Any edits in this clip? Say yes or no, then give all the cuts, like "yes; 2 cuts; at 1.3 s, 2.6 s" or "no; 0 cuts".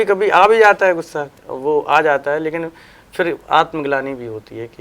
yes; 1 cut; at 1.2 s